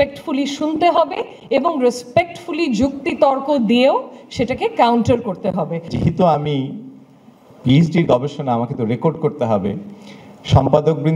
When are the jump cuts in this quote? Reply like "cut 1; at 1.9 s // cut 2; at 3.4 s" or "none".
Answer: cut 1; at 5.9 s